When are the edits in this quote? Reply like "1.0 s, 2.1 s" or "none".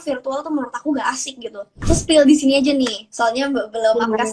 1.8 s